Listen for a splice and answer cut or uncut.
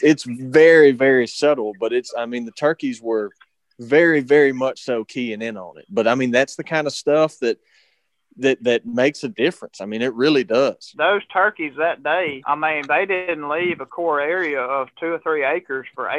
cut